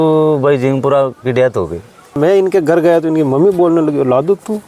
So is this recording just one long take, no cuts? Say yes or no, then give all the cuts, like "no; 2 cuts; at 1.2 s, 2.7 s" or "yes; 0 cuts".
no; 1 cut; at 2.2 s